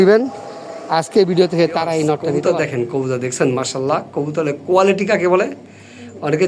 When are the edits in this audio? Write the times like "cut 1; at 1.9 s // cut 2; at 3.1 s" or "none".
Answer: cut 1; at 2.4 s